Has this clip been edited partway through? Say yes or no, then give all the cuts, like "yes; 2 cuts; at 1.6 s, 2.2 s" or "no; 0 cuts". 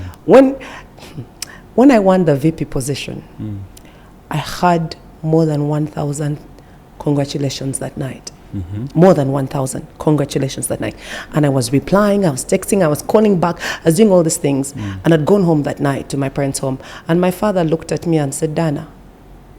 no; 0 cuts